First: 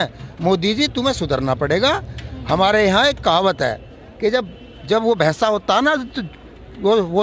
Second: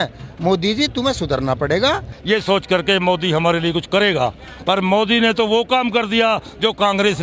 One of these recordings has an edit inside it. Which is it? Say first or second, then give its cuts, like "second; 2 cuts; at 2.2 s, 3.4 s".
second; 1 cut; at 2.1 s